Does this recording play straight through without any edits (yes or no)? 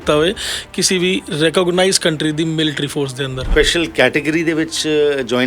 no